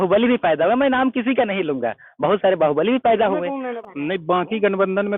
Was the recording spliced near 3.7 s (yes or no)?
yes